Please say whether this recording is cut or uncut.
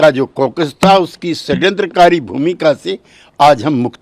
uncut